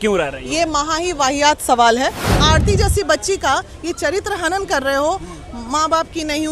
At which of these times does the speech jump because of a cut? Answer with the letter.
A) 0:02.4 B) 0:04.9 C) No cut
A